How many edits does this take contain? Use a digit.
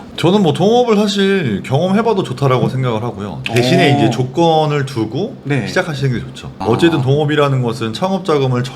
0